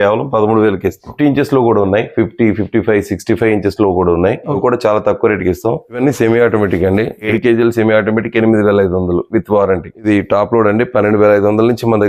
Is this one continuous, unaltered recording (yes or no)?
no